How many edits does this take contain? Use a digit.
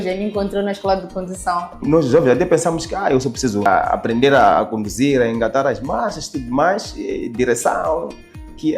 2